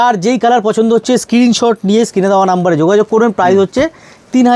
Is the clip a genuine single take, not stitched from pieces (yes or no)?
yes